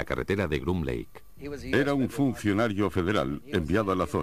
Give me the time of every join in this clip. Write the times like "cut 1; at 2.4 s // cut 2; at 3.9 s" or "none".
cut 1; at 2.4 s